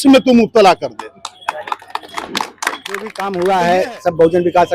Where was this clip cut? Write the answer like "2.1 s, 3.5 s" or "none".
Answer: 3.2 s

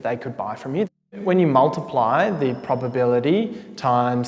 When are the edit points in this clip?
1.2 s

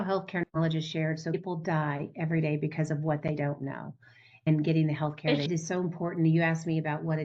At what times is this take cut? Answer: 1.3 s, 5.5 s

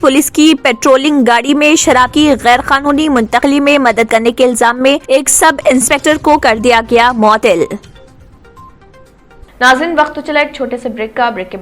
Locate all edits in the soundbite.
9.5 s

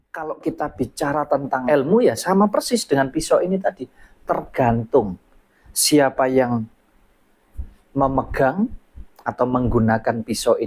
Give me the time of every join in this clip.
1.6 s

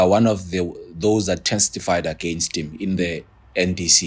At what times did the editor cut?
none

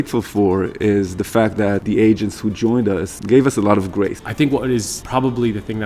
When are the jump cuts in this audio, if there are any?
1.8 s, 3.2 s, 4.2 s, 5.0 s

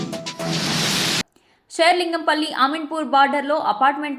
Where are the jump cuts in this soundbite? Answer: none

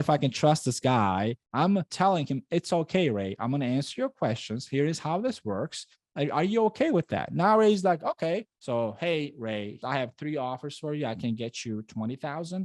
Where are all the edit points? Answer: 8.5 s

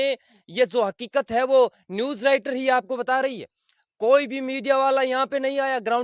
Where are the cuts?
none

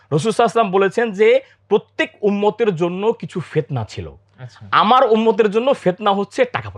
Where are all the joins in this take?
none

